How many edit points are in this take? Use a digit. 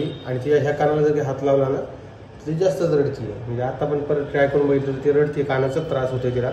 0